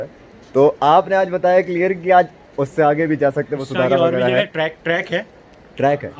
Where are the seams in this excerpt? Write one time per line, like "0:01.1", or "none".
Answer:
none